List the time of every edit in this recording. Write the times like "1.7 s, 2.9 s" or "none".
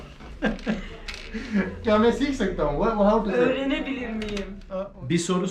4.6 s